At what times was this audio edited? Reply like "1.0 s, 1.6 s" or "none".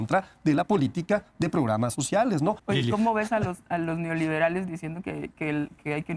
2.6 s